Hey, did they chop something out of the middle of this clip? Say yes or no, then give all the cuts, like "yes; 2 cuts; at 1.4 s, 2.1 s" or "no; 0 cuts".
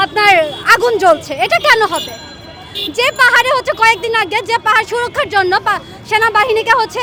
no; 0 cuts